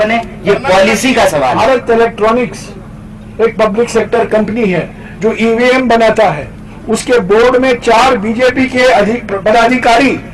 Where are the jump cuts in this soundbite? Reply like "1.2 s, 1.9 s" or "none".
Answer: 1.5 s